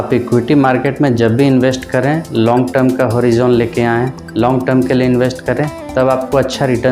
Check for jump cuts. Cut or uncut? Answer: uncut